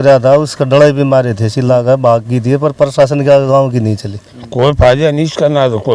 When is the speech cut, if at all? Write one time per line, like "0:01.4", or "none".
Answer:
0:04.4